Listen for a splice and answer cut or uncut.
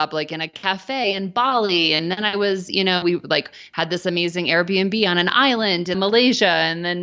cut